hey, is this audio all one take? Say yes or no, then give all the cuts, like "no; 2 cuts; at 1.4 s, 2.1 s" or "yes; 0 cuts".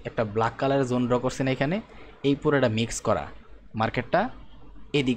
yes; 0 cuts